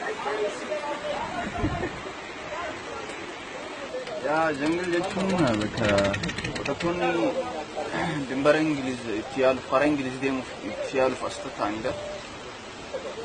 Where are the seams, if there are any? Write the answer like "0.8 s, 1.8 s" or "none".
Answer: none